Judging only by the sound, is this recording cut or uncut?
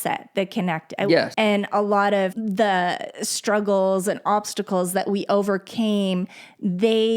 cut